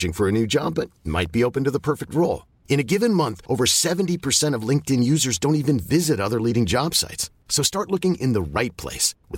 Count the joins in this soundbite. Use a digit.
0